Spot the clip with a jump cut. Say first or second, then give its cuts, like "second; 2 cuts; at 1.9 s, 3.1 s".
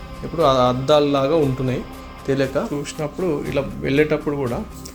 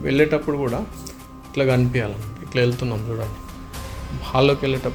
first; 1 cut; at 2.7 s